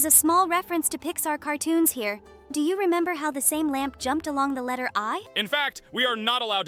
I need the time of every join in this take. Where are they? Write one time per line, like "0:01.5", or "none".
none